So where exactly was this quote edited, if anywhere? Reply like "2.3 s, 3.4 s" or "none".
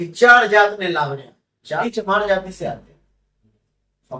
1.8 s